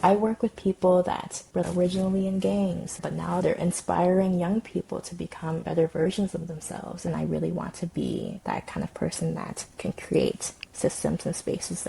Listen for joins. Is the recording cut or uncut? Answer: cut